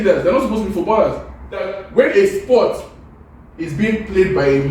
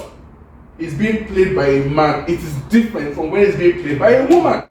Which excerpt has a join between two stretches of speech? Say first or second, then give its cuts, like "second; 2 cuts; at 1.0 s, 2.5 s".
first; 1 cut; at 1.8 s